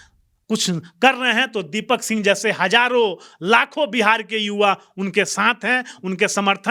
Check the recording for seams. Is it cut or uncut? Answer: uncut